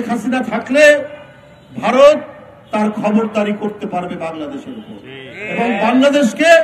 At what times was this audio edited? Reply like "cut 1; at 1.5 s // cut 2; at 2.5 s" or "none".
none